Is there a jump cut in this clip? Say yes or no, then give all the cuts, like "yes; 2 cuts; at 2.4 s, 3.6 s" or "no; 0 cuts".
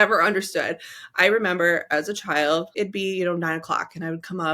yes; 1 cut; at 2.7 s